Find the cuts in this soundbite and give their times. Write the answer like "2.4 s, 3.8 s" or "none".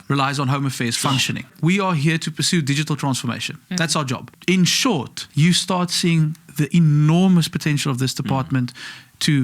1.5 s, 4.3 s, 5.2 s